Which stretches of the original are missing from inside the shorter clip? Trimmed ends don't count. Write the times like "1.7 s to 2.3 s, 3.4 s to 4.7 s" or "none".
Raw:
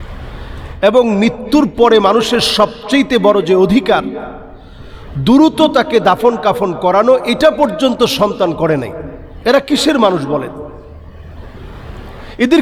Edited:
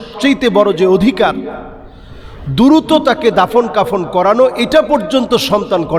none